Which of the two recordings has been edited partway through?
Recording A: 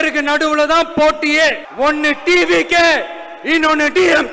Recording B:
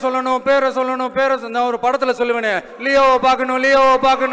A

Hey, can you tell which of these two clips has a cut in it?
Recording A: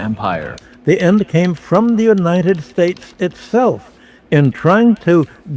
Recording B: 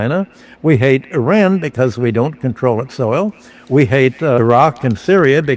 A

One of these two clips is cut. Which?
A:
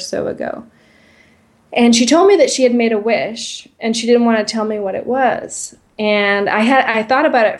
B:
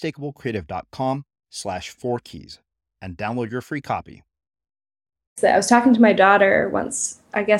B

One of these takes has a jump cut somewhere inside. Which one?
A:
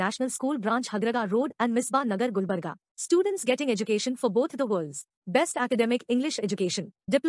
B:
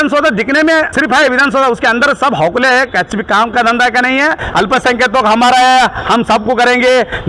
B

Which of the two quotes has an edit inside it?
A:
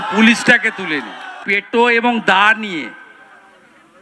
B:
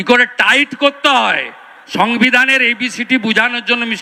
A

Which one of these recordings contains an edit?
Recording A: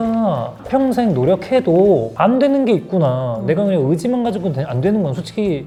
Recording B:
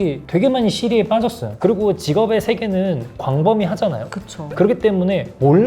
B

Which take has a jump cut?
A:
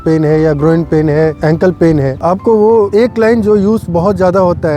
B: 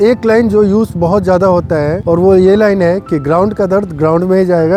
A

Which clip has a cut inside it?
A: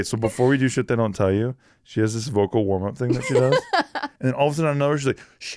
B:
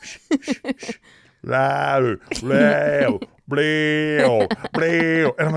A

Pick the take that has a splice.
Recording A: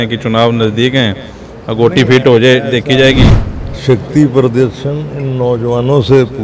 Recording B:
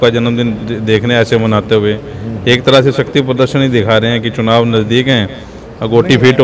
A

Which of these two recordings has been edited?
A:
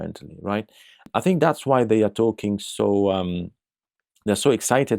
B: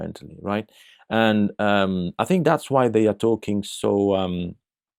A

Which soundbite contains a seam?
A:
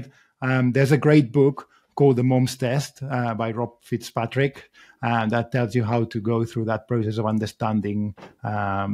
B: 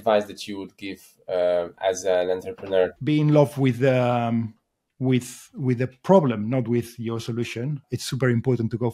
B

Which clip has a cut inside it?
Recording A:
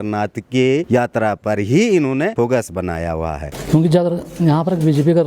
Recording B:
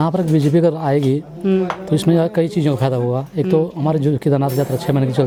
A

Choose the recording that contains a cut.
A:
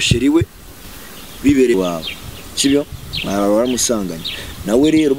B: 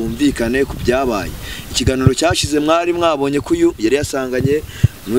A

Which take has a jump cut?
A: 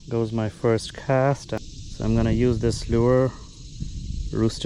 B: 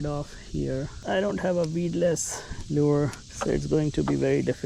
B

